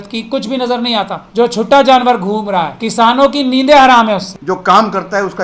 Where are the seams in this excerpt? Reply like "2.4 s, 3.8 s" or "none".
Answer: 1.2 s, 2.8 s, 4.4 s

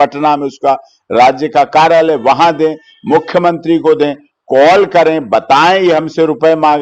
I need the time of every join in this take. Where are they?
none

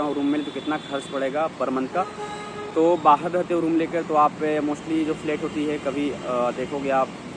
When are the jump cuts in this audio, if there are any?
none

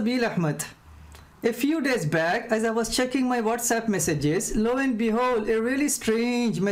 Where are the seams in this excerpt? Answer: none

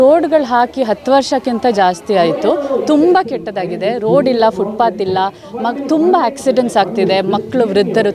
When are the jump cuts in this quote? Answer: none

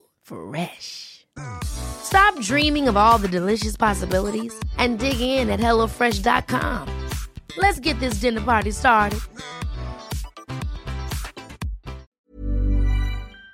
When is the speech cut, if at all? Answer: 12.1 s

